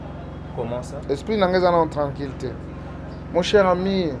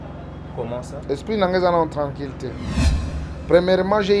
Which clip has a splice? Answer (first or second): second